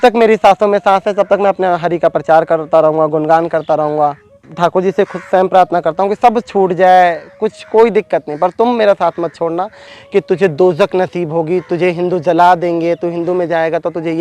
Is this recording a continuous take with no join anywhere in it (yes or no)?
no